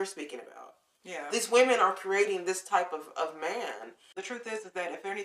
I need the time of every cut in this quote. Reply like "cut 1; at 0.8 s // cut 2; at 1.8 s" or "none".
cut 1; at 4.1 s